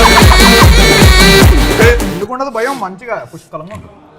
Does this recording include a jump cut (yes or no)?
no